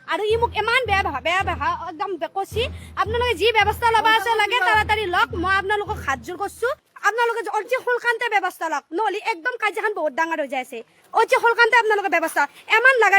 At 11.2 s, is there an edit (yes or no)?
no